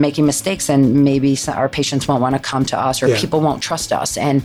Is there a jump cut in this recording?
yes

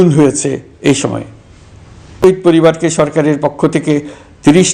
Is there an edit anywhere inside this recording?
yes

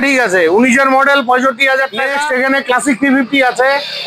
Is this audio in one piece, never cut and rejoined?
no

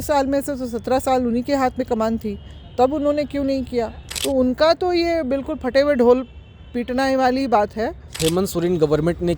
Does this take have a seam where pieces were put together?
yes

